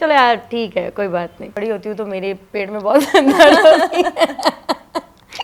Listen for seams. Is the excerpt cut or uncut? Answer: cut